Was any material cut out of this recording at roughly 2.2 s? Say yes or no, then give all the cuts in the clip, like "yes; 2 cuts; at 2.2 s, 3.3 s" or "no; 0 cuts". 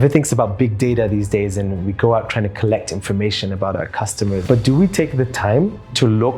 no; 1 cut; at 4.4 s